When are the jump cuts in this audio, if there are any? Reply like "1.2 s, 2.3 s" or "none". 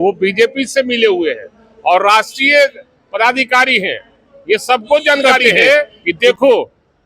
6.0 s